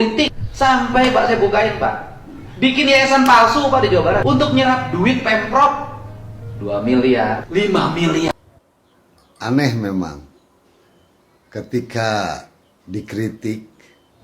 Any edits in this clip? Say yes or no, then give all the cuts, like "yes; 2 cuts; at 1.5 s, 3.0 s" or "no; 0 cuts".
yes; 1 cut; at 8.5 s